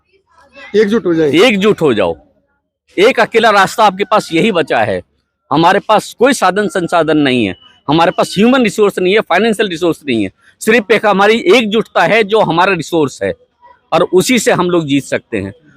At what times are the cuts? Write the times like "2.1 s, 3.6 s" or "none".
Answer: none